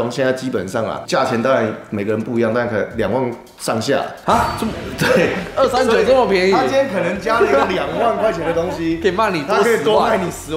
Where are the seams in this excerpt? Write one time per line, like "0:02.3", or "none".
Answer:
none